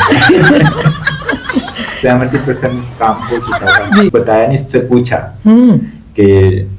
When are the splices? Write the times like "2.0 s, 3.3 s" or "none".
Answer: 4.1 s